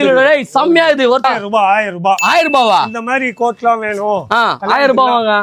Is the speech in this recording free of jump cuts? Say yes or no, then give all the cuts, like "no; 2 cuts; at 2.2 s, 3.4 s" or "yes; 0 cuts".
no; 1 cut; at 1.3 s